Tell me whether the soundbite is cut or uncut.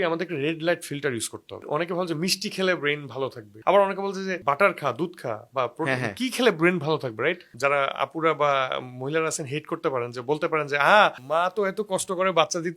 cut